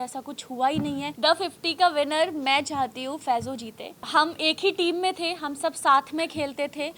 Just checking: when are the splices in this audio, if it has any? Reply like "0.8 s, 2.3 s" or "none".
1.1 s, 4.0 s